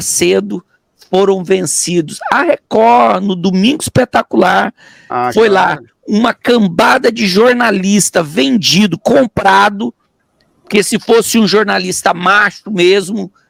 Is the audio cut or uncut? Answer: uncut